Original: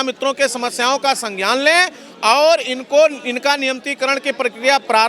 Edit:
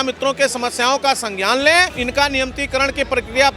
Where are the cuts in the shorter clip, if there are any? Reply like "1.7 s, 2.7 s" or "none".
2.0 s